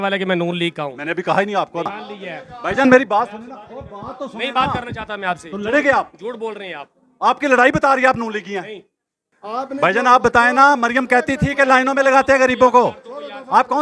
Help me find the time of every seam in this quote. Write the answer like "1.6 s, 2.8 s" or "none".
none